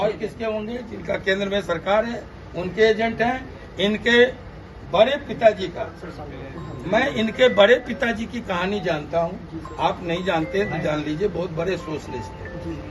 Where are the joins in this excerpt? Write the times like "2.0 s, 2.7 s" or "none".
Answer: none